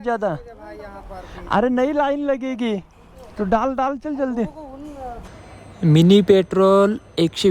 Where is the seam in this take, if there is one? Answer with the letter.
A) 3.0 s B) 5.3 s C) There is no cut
B